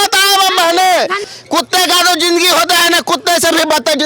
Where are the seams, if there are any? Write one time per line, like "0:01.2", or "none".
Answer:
0:01.2